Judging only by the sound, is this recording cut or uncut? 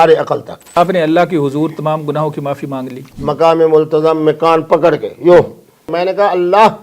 cut